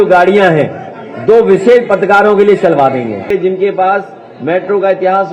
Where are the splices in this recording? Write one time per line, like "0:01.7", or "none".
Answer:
0:03.3